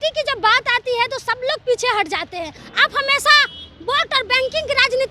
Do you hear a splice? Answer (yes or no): yes